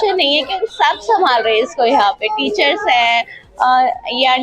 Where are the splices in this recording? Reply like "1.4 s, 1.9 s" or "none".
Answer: none